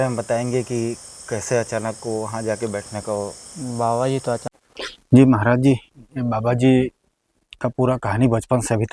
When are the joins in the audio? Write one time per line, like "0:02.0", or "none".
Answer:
0:05.1